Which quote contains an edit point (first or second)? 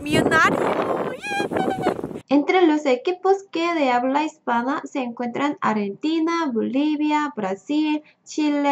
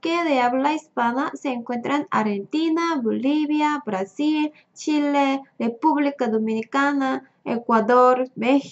first